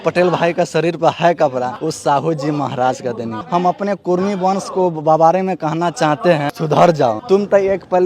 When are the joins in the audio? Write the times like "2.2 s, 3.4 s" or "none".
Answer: 1.7 s, 3.4 s, 6.5 s, 7.2 s